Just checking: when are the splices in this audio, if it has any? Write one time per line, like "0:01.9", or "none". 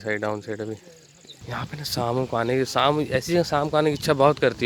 none

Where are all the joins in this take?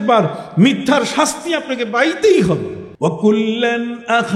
0:02.8

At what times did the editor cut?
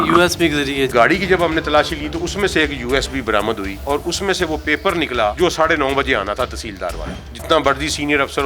0:00.9
0:07.3

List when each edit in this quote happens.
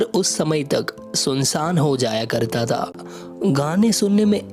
0:03.1

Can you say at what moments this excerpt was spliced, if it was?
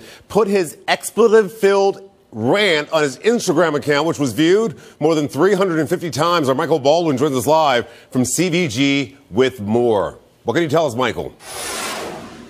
0:03.2

